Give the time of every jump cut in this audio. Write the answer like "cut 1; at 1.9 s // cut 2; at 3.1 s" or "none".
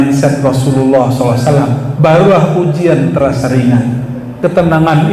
cut 1; at 4.2 s